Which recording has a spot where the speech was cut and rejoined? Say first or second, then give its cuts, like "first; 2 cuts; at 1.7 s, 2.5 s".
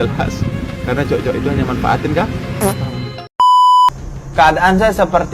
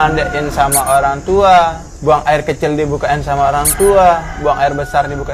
first; 2 cuts; at 3.3 s, 3.9 s